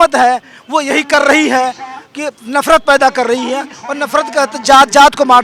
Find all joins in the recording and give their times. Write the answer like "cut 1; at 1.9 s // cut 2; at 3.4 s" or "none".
none